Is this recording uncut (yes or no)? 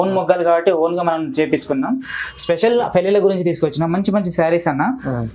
no